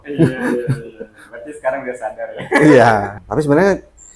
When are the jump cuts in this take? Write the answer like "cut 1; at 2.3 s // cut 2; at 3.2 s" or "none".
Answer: cut 1; at 3.2 s